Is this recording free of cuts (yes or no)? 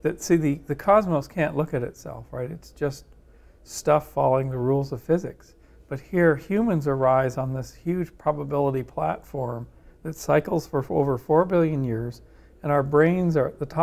yes